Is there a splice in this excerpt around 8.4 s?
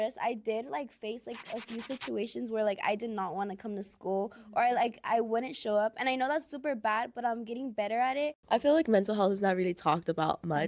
yes; 1 cut; at 8.4 s

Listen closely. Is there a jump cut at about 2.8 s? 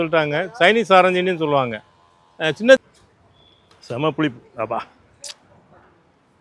yes; 1 cut; at 2.8 s

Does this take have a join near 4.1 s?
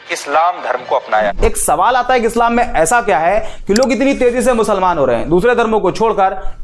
no; 1 cut; at 1.3 s

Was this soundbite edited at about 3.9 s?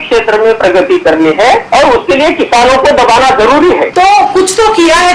yes; 2 cuts; at 1.6 s, 3.9 s

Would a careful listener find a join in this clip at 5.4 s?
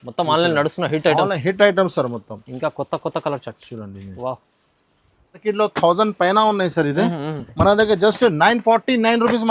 yes; 1 cut; at 5.4 s

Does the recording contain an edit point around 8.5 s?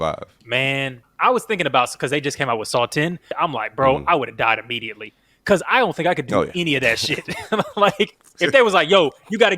yes; 3 cuts; at 1.1 s, 3.3 s, 8.5 s

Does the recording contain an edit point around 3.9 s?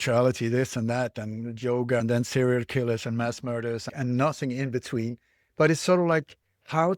yes; 3 cuts; at 2.0 s, 3.9 s, 5.4 s

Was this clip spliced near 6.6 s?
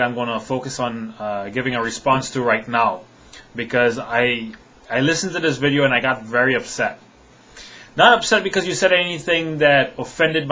yes; 1 cut; at 6.6 s

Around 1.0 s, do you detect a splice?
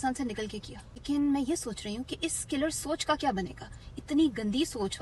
yes; 1 cut; at 1.0 s

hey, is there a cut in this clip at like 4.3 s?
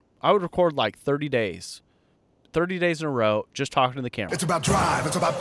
yes; 1 cut; at 4.3 s

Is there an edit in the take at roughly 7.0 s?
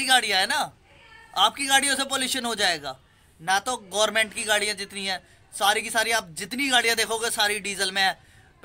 no; 0 cuts

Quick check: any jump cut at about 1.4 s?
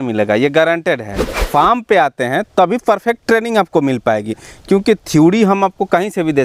yes; 1 cut; at 1.4 s

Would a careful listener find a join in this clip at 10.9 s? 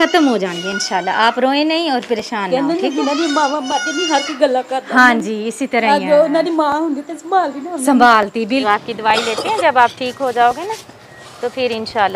no; 1 cut; at 8.6 s

